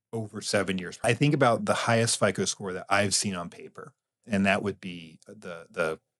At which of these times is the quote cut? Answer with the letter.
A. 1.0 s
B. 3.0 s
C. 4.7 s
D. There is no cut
A